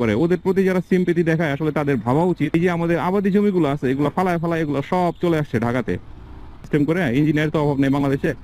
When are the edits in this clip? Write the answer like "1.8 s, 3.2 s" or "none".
2.5 s, 6.6 s